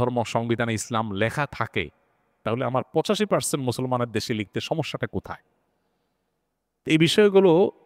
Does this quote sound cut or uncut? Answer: uncut